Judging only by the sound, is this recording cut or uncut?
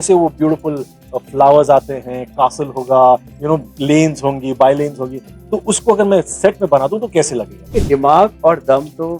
cut